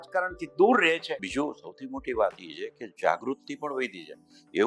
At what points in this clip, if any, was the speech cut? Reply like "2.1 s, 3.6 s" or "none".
1.2 s